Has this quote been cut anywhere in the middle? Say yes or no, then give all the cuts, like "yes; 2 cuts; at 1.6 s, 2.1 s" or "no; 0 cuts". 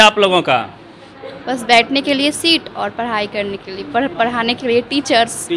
no; 0 cuts